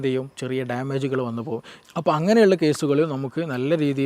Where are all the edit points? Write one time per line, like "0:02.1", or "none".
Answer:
0:01.7

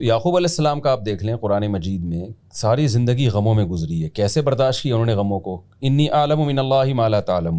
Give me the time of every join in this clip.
none

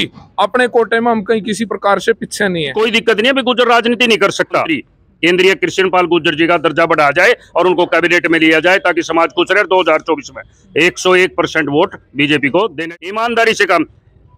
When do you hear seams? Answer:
0:02.7
0:04.8
0:12.8

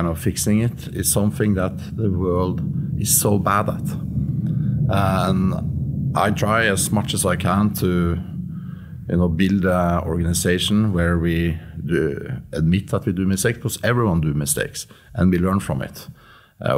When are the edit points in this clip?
none

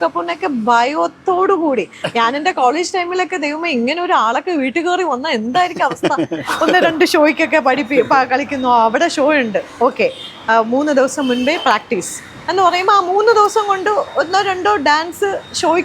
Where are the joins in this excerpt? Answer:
0:06.4

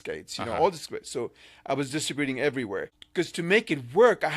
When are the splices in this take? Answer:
0:02.9

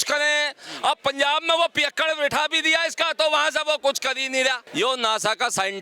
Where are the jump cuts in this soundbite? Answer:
0:04.6

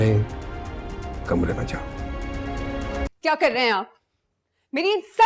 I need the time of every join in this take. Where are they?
0:03.1

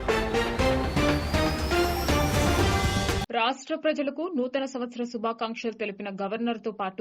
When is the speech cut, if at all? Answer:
none

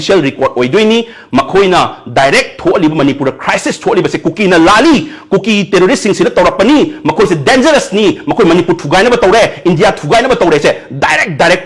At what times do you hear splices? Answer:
none

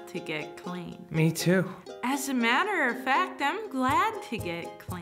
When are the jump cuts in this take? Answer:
none

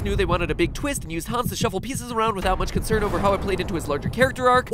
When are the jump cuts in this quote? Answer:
0:02.8

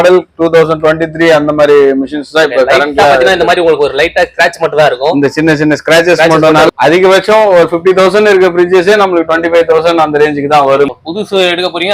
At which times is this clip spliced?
0:06.7
0:10.9

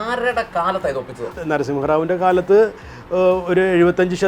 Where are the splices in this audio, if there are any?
0:01.4

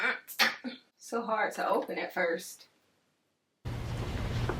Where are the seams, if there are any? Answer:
0:00.9

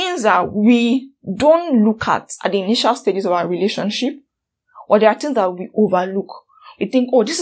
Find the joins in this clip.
none

